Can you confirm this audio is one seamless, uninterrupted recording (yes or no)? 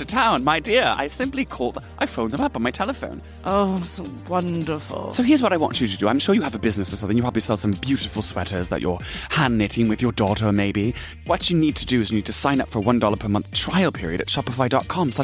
yes